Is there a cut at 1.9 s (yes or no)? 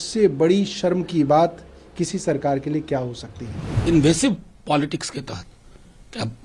no